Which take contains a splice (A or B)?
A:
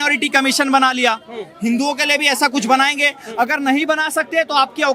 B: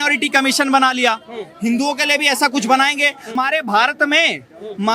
B